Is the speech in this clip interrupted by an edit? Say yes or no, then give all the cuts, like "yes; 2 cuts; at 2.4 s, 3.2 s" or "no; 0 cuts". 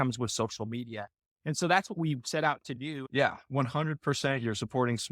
yes; 1 cut; at 2.9 s